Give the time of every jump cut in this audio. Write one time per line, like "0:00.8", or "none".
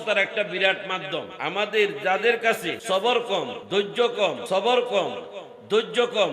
0:01.4
0:02.7
0:03.6
0:04.4